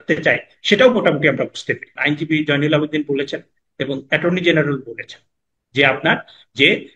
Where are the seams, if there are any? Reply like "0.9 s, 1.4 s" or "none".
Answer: 1.9 s